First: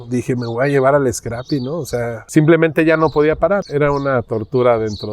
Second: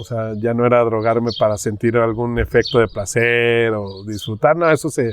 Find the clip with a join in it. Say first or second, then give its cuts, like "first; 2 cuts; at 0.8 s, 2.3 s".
first; 2 cuts; at 2.2 s, 3.6 s